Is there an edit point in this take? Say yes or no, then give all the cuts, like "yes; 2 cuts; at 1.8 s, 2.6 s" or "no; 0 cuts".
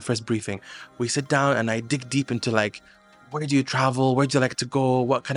no; 0 cuts